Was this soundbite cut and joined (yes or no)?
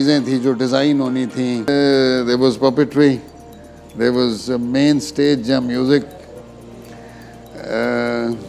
yes